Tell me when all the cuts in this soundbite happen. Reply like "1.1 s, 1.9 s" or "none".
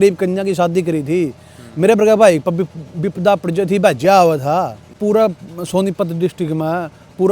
5.0 s